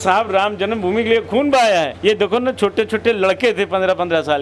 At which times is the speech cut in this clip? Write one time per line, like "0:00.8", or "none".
none